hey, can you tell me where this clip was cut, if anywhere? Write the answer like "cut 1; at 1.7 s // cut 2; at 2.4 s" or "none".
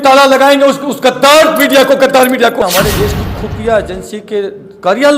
cut 1; at 3.0 s